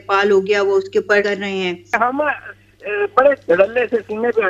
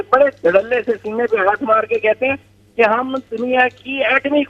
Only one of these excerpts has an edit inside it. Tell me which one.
first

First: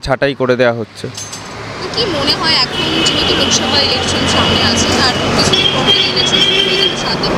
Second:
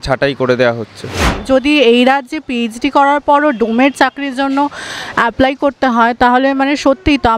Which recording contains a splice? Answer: second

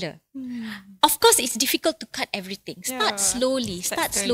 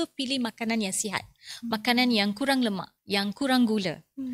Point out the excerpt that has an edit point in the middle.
second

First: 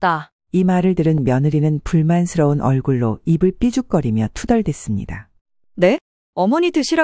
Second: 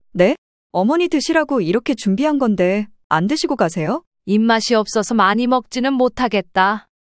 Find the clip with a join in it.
second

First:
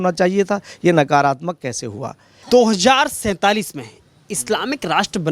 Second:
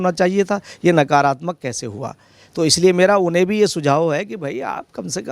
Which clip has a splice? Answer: first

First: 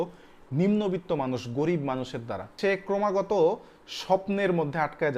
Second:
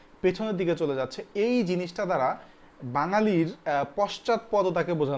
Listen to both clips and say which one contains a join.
first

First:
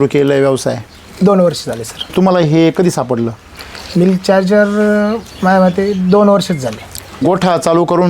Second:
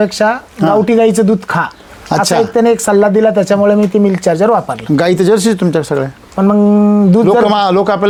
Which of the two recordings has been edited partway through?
first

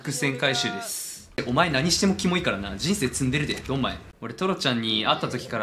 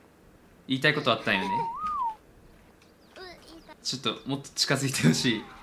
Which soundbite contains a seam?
first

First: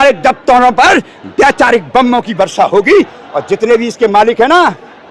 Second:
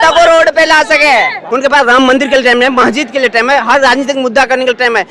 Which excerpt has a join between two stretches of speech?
second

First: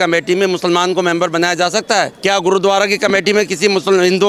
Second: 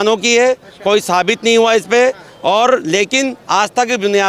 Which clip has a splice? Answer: first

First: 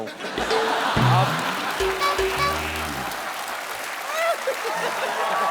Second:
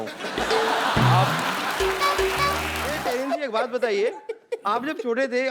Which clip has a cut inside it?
second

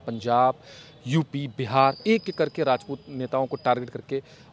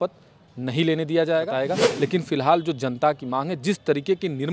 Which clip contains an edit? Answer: second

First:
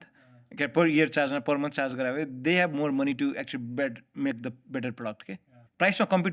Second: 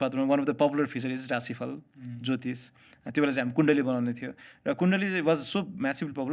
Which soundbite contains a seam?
first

